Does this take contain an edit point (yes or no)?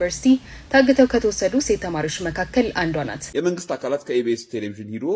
yes